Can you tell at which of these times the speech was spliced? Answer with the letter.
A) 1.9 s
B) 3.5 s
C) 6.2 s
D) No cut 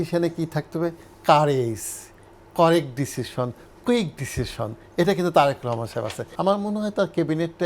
C